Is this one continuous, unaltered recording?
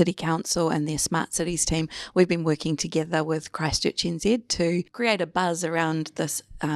no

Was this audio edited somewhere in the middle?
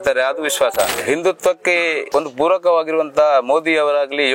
yes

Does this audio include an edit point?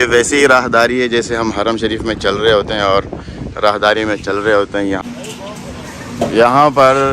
yes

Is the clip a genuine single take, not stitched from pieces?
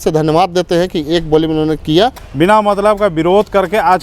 no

